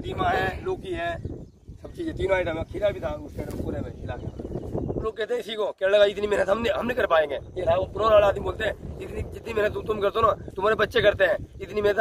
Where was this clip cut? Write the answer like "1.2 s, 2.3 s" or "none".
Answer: 5.1 s

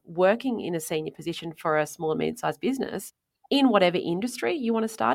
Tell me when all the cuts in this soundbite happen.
none

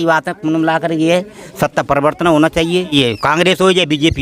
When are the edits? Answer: 2.9 s

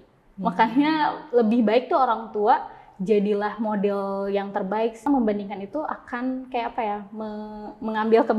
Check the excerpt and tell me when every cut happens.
5.0 s

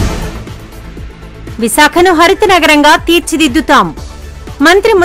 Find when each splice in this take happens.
none

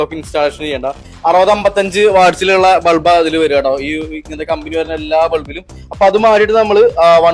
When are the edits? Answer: 1.1 s

